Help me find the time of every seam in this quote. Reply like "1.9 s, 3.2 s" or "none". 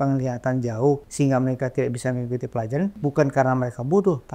1.1 s, 3.0 s